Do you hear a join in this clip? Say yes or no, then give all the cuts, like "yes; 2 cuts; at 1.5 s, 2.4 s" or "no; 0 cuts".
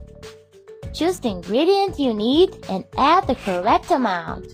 yes; 1 cut; at 1.0 s